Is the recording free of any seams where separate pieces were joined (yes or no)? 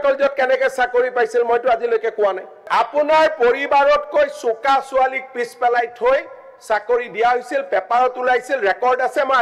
no